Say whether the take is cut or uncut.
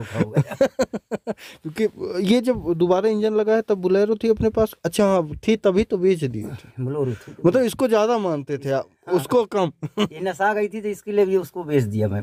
uncut